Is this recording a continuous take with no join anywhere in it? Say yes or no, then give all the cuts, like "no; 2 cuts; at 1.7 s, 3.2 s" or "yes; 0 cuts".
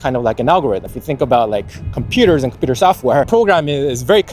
no; 2 cuts; at 0.9 s, 3.3 s